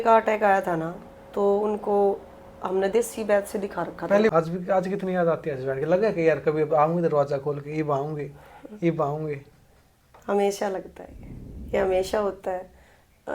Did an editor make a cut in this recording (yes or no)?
yes